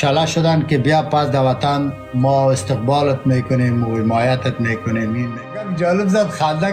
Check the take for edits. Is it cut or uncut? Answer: cut